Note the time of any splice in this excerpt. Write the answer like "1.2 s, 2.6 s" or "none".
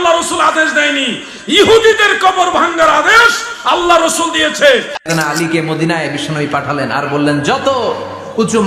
5.0 s